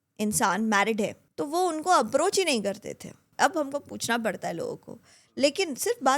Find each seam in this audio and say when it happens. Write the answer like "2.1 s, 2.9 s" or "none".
1.2 s, 3.2 s